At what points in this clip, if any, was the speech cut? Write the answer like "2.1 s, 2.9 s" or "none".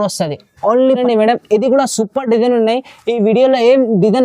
1.0 s